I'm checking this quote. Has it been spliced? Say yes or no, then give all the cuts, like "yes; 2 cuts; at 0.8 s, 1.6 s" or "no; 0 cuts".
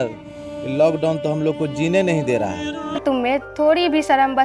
yes; 1 cut; at 3.0 s